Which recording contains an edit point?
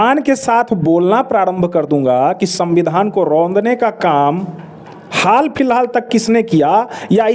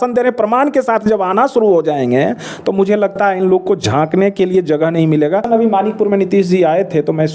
second; 1 cut; at 5.5 s

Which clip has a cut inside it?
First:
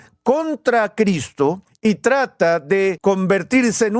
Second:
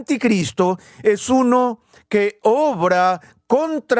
first; 2 cuts; at 1.7 s, 3.0 s

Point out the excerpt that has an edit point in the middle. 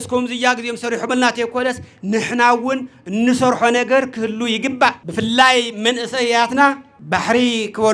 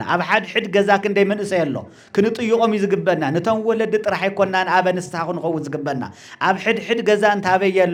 first; 2 cuts; at 5.0 s, 6.9 s

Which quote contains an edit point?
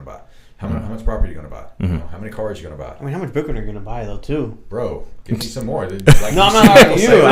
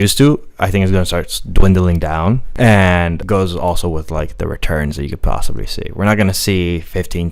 second; 2 cuts; at 2.5 s, 3.2 s

